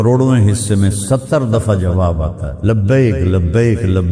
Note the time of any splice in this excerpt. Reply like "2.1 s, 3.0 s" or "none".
2.5 s